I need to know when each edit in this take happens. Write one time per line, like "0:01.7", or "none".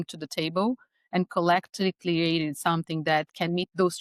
none